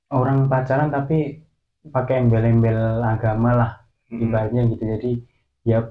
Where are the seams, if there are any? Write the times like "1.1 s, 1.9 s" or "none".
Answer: none